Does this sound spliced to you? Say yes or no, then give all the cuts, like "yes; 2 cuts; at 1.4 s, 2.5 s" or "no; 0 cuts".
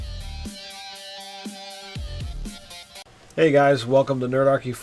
yes; 1 cut; at 2.9 s